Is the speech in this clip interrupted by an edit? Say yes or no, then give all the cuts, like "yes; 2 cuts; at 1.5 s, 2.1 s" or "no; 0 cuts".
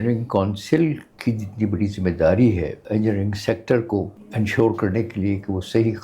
yes; 3 cuts; at 1.1 s, 2.8 s, 4.2 s